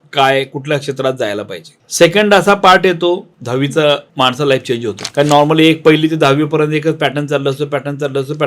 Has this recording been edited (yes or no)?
yes